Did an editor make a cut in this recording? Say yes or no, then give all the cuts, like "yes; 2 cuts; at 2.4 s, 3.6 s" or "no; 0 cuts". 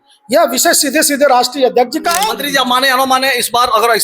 yes; 1 cut; at 1.9 s